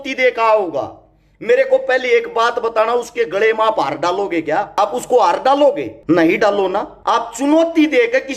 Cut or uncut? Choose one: cut